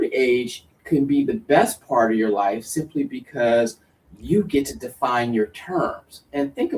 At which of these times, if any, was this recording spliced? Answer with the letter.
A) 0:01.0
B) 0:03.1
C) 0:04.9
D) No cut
D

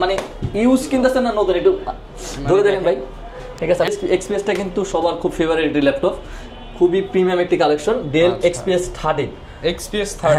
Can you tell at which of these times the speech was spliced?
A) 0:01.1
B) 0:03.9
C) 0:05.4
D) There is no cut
B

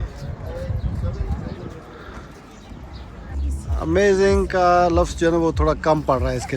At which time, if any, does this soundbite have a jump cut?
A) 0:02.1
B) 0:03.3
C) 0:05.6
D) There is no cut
B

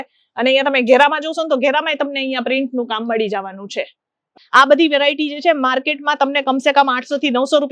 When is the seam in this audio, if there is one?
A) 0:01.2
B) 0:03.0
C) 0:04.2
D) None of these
C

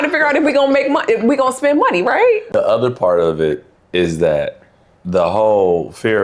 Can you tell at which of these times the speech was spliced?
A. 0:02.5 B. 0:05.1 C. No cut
A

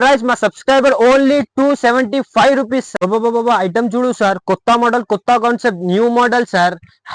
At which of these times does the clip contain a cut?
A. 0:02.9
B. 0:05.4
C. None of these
A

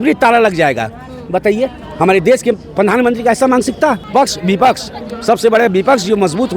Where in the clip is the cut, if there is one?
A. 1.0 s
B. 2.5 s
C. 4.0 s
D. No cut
C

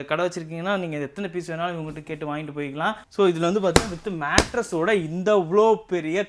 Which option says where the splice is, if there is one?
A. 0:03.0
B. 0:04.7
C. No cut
A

